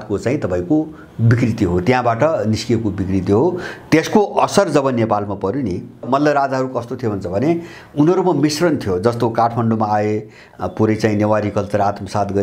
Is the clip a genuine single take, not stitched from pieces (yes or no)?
no